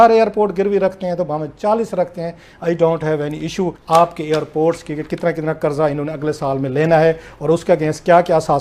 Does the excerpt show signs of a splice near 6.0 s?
no; 1 cut; at 3.8 s

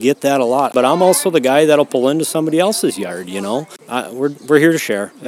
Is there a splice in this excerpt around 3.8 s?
yes; 2 cuts; at 0.7 s, 3.8 s

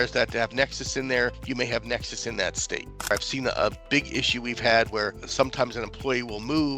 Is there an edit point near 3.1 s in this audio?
yes; 2 cuts; at 1.4 s, 3.1 s

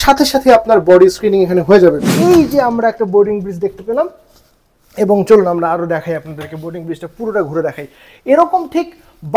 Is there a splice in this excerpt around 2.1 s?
yes; 1 cut; at 2.1 s

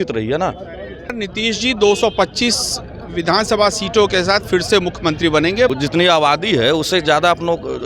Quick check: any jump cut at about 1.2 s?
yes; 2 cuts; at 1.2 s, 5.7 s

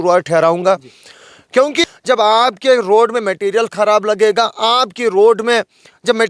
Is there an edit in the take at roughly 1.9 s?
yes; 1 cut; at 1.9 s

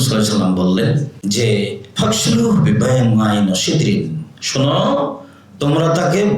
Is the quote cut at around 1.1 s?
yes; 1 cut; at 1.1 s

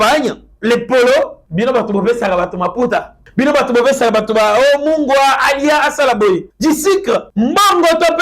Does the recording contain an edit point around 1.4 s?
yes; 4 cuts; at 1.4 s, 3.2 s, 6.5 s, 7.3 s

